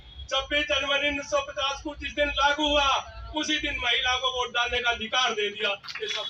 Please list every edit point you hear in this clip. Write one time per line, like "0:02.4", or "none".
none